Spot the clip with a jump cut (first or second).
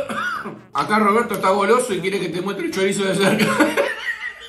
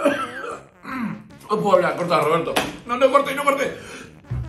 second